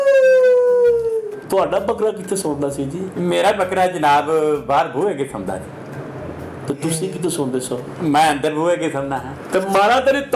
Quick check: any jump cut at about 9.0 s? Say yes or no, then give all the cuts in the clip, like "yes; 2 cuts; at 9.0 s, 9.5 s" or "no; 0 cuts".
no; 1 cut; at 1.4 s